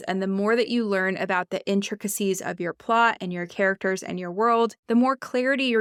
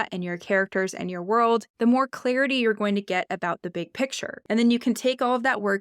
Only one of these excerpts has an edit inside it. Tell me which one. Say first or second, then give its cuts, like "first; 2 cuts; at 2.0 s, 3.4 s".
second; 1 cut; at 4.4 s